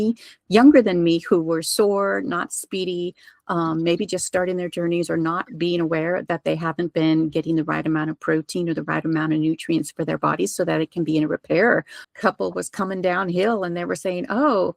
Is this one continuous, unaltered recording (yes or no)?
no